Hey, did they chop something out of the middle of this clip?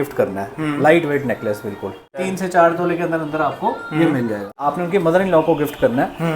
yes; 2 cuts; at 2.2 s, 4.6 s

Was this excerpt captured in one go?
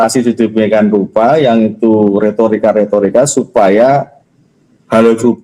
yes; 0 cuts

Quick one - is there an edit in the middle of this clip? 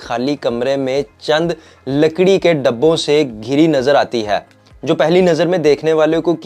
no; 0 cuts

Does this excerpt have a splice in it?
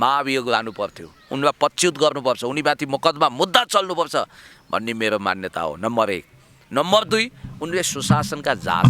no; 0 cuts

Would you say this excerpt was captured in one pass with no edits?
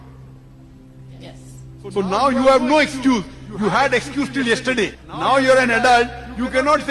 no; 1 cut; at 4.9 s

